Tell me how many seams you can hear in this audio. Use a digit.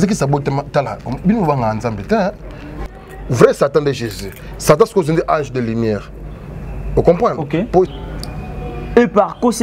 2